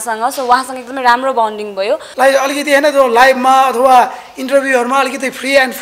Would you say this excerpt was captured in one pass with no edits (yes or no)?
no